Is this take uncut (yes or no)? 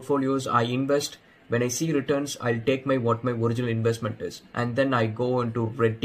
yes